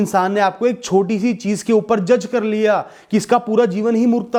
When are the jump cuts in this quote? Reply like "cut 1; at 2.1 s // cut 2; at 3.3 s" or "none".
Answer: none